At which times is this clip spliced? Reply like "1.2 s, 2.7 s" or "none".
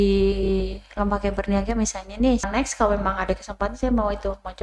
2.5 s